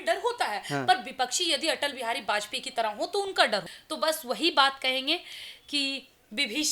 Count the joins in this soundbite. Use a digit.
1